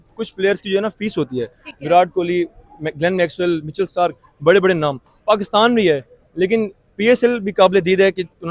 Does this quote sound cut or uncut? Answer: uncut